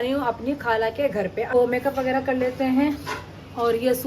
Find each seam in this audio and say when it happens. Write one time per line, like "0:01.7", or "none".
0:01.5